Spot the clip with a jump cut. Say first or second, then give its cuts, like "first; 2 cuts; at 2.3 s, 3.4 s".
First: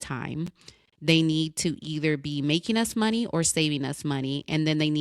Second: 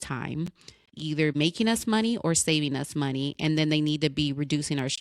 second; 1 cut; at 1.1 s